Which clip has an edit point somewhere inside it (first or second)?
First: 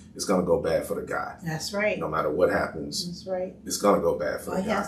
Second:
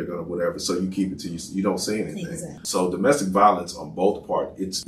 second